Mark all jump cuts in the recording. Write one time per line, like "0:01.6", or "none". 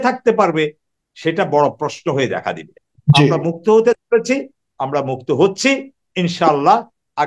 0:02.9